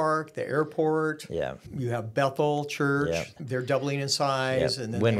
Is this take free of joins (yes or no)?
no